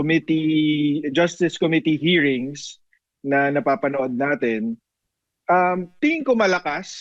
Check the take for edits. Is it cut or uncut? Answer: uncut